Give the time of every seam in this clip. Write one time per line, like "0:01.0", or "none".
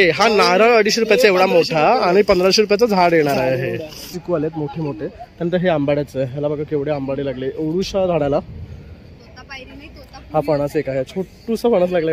0:04.1